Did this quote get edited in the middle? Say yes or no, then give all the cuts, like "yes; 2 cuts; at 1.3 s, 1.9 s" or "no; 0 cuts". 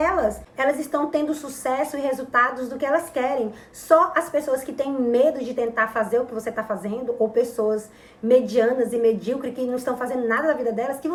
no; 0 cuts